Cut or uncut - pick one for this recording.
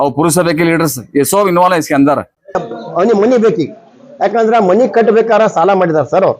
cut